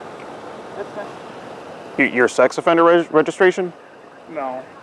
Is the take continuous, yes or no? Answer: yes